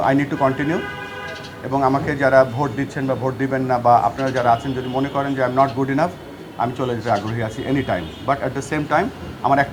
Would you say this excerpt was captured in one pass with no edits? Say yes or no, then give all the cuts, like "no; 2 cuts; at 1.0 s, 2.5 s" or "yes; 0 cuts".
yes; 0 cuts